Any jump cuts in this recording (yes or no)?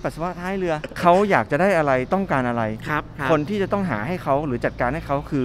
yes